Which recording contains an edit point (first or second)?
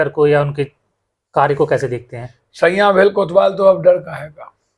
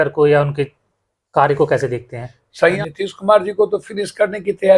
second